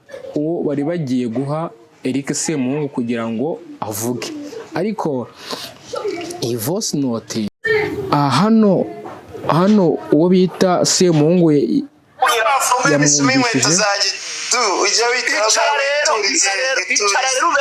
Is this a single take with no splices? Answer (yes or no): no